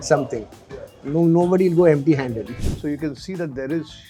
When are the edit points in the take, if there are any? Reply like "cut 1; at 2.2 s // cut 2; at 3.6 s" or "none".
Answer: cut 1; at 2.6 s

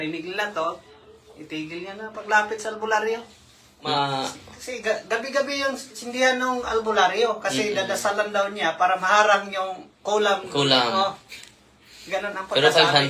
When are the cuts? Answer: cut 1; at 3.8 s

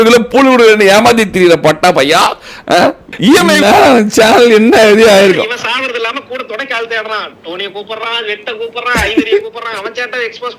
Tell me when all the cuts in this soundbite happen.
cut 1; at 3.6 s

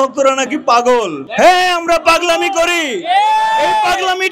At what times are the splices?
cut 1; at 1.2 s

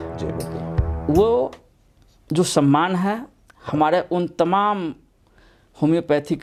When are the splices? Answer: none

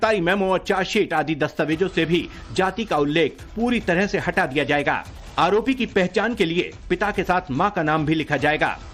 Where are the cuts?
none

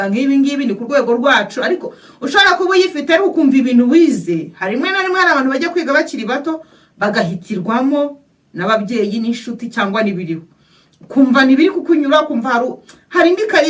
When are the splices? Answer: none

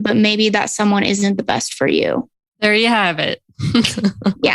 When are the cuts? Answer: cut 1; at 2.4 s

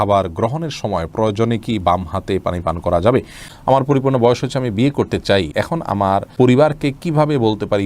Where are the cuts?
cut 1; at 3.5 s // cut 2; at 5.9 s

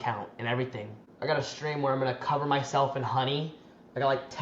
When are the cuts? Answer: cut 1; at 1.1 s

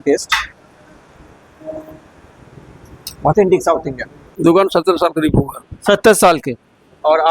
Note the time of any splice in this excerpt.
cut 1; at 4.2 s

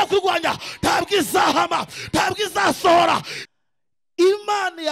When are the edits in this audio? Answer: cut 1; at 3.3 s

